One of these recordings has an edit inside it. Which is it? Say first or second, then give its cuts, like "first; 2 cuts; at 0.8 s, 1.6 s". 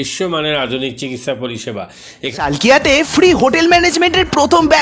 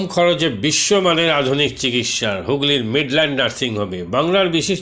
first; 1 cut; at 2.3 s